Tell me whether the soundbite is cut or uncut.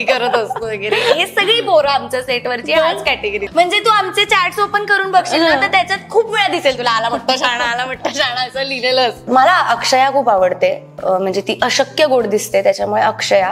cut